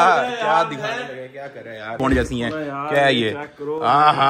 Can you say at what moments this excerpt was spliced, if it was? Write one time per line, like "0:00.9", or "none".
0:01.9